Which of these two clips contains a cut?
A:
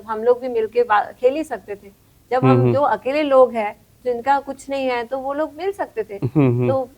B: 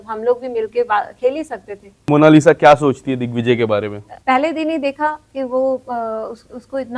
B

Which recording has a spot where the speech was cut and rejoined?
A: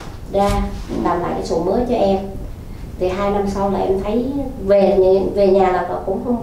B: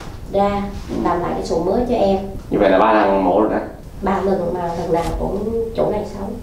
B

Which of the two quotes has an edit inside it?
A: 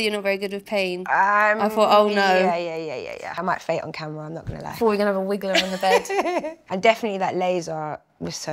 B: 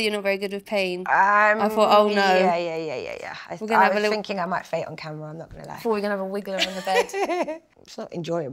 A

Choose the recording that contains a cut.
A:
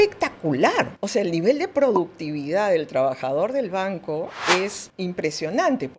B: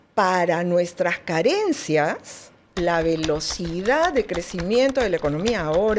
A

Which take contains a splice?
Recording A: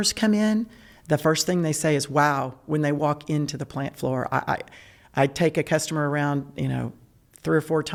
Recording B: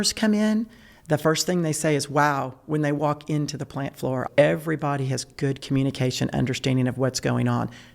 B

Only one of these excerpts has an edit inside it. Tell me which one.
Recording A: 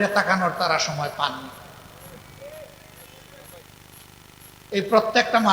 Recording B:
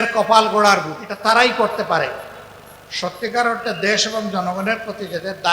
B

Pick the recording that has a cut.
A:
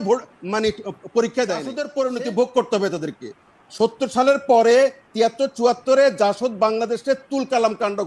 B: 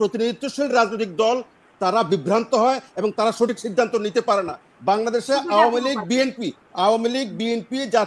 A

